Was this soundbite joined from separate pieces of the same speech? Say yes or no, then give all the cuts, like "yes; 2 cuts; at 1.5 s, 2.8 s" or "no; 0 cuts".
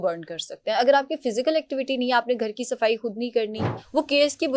yes; 1 cut; at 3.6 s